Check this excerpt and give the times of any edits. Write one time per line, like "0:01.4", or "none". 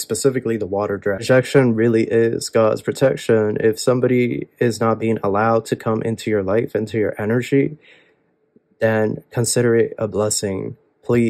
0:01.2